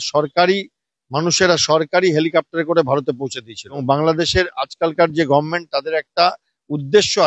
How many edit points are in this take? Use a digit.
1